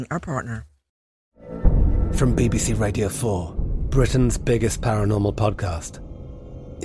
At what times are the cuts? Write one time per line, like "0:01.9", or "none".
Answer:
0:01.0